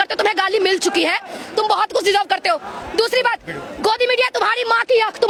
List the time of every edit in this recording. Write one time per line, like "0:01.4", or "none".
none